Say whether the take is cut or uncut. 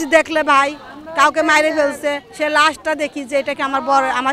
uncut